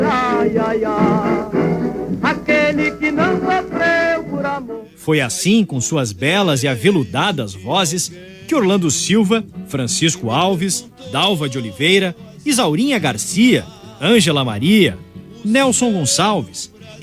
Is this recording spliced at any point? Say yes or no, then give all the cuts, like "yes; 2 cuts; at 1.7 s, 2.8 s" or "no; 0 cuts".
no; 0 cuts